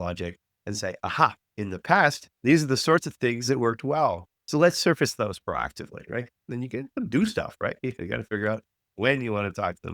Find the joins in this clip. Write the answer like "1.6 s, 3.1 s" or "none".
1.5 s, 4.3 s, 6.5 s